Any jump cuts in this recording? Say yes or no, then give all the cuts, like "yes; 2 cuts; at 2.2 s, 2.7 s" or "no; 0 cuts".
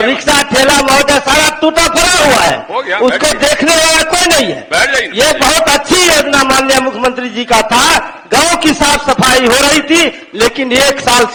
no; 0 cuts